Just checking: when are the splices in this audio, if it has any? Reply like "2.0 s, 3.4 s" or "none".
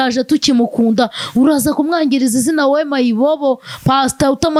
none